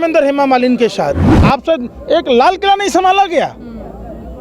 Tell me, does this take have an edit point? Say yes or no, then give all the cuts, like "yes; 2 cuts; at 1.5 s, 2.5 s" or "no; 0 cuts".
yes; 1 cut; at 1.3 s